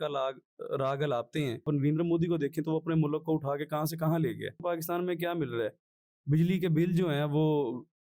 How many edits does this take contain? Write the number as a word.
two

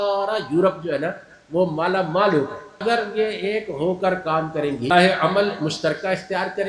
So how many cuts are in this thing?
two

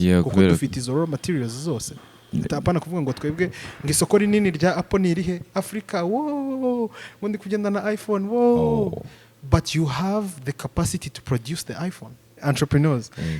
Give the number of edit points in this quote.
one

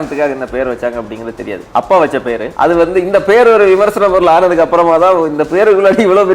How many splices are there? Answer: two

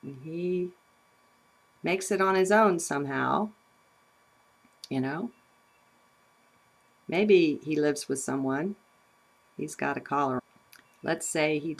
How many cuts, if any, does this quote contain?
zero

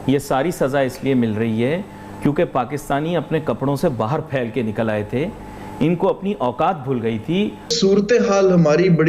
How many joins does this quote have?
one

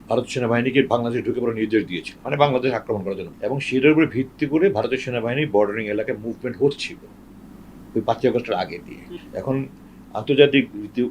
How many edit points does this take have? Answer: three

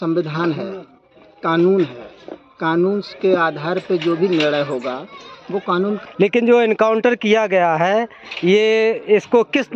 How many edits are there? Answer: one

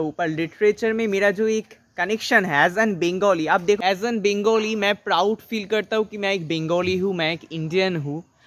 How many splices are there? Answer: one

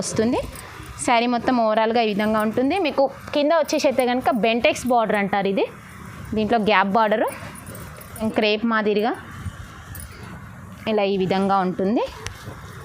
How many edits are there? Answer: one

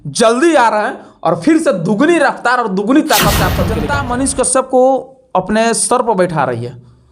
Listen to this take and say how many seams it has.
one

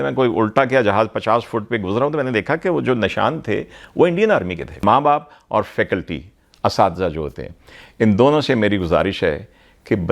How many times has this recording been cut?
one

